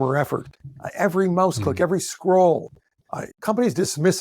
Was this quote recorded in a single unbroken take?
no; 1 cut; at 3.3 s

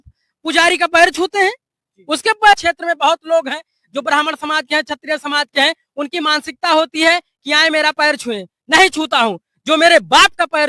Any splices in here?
yes; 1 cut; at 2.6 s

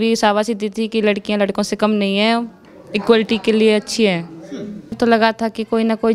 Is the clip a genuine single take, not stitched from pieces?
no; 1 cut; at 5.0 s

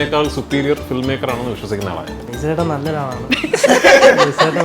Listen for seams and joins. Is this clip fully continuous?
no; 1 cut; at 2.3 s

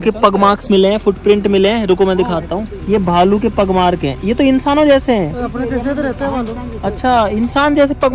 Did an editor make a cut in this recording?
no; 0 cuts

